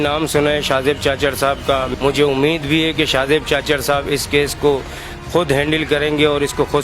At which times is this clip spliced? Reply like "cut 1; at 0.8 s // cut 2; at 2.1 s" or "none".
none